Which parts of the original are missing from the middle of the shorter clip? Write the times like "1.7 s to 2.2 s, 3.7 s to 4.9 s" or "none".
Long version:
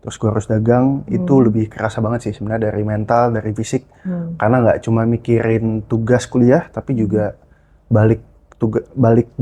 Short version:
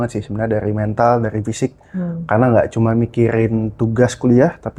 none